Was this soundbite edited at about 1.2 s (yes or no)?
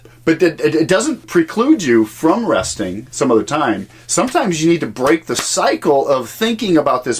yes